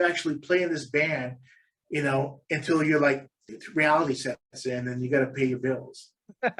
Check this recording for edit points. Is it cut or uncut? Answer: uncut